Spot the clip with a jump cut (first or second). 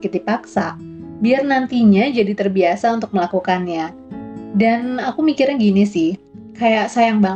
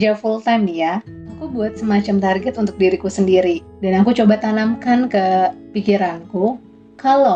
second